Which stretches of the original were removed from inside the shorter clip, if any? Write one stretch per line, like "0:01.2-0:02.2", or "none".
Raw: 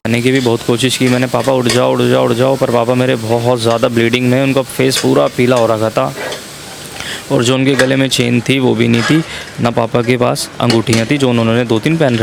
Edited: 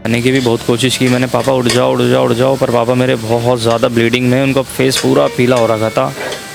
none